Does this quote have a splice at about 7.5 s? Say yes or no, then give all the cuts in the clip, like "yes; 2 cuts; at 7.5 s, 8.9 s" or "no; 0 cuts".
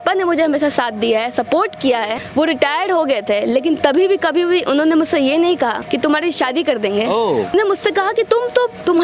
yes; 3 cuts; at 2.2 s, 5.8 s, 7.5 s